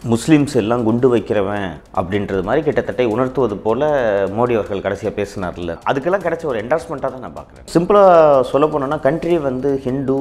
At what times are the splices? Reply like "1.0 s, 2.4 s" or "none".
1.8 s, 5.8 s, 7.6 s